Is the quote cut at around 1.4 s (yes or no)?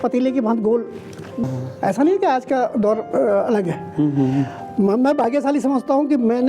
yes